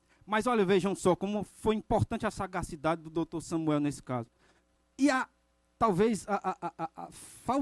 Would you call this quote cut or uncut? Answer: uncut